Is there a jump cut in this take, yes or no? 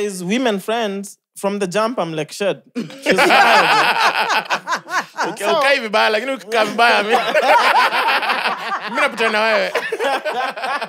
no